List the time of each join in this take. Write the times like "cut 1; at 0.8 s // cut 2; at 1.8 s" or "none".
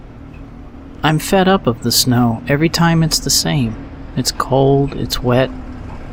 none